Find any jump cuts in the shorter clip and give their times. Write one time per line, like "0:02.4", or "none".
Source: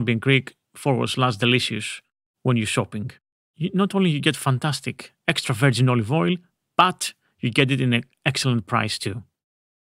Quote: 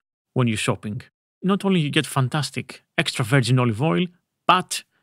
0:01.4